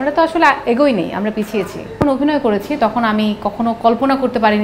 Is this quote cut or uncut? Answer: cut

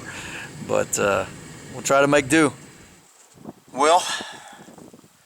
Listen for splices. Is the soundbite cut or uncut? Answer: uncut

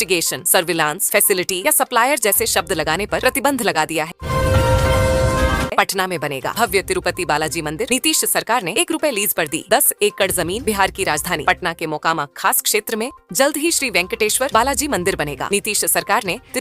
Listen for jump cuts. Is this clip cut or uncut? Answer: cut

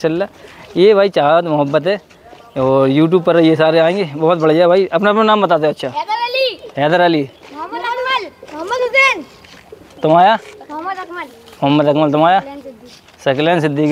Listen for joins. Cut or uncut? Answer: uncut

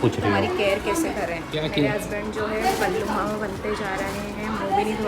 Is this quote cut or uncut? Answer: cut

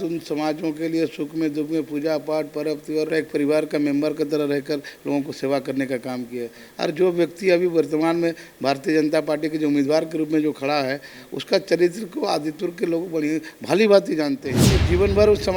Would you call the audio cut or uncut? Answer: uncut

